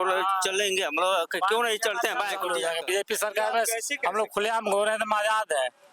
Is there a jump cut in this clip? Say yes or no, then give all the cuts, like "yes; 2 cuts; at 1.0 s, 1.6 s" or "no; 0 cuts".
yes; 1 cut; at 2.5 s